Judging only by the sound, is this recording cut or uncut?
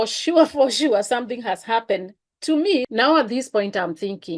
cut